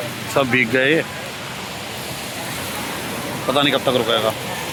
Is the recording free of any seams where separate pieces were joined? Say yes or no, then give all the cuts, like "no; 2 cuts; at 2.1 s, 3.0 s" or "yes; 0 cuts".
yes; 0 cuts